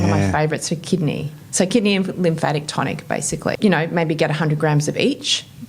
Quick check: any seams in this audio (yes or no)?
yes